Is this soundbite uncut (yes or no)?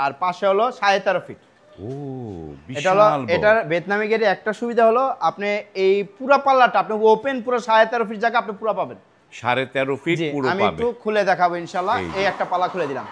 yes